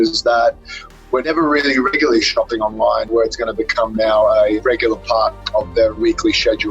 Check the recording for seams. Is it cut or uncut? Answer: cut